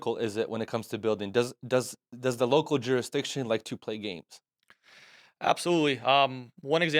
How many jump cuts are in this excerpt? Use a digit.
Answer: 0